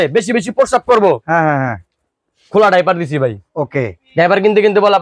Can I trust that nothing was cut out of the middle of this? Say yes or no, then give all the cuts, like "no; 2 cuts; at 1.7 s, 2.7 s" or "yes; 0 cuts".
yes; 0 cuts